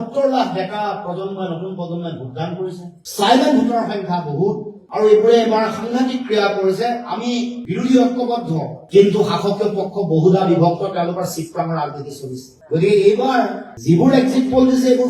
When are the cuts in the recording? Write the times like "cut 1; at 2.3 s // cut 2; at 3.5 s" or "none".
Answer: cut 1; at 4.8 s